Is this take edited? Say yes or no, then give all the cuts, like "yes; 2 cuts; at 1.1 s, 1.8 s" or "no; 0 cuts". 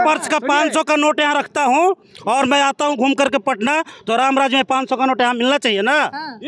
no; 0 cuts